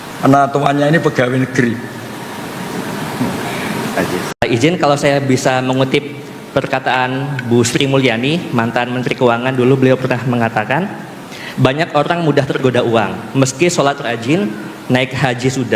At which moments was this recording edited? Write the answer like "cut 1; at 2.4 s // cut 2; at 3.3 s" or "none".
cut 1; at 4.4 s

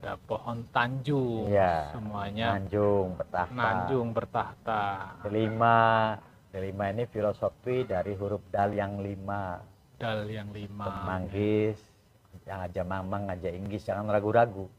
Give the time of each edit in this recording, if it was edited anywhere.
cut 1; at 11.0 s

